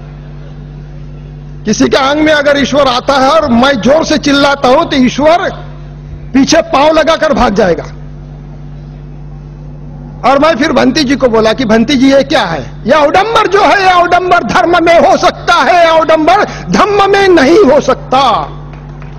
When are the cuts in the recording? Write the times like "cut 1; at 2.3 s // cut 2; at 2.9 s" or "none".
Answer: cut 1; at 7.9 s